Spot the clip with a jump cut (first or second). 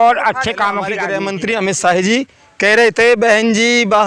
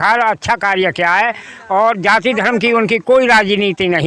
first